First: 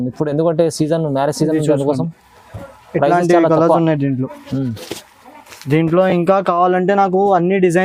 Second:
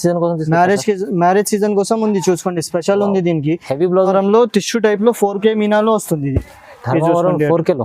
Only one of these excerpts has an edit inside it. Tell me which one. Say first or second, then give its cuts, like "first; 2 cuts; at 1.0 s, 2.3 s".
second; 1 cut; at 4.1 s